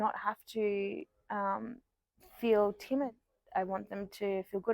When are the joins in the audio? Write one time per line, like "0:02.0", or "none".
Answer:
0:03.1

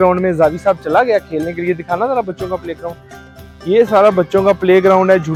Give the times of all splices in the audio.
none

